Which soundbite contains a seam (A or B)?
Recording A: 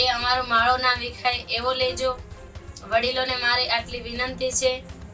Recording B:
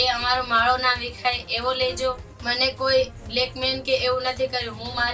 B